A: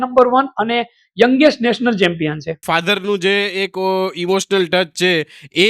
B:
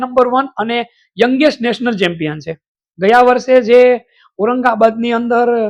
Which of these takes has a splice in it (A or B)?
A